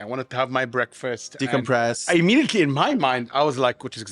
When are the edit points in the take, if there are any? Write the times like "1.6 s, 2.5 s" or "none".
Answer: 2.0 s